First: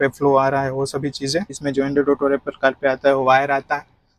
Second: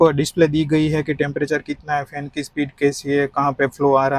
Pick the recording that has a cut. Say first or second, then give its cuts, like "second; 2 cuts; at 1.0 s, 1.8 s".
first; 1 cut; at 1.6 s